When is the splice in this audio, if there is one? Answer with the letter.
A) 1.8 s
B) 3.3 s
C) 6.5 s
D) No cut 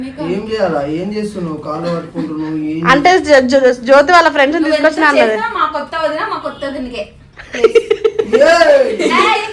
D